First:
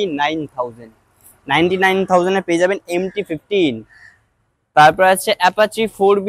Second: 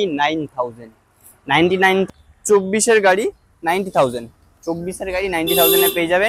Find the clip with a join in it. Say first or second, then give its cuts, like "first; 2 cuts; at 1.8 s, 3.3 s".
second; 1 cut; at 2.1 s